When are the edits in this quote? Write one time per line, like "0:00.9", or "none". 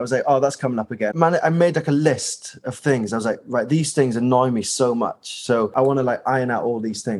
0:01.1
0:05.7